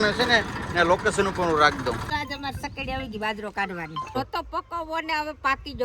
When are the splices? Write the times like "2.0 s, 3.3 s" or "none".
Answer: 2.1 s, 4.2 s